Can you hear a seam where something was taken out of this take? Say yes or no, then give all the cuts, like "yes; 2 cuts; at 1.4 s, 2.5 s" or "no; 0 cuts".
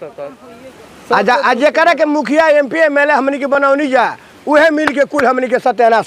no; 0 cuts